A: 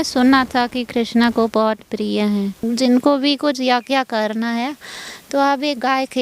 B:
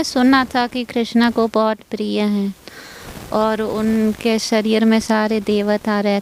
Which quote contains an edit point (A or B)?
A